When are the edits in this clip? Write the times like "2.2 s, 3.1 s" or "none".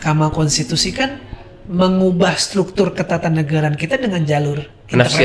none